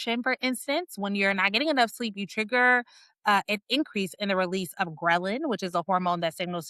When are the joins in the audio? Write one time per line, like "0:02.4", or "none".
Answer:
none